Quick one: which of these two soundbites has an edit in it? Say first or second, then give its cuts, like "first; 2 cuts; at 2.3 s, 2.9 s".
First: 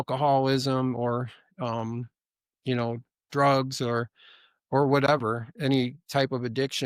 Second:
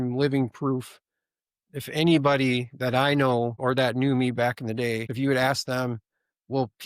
second; 2 cuts; at 3.6 s, 5.1 s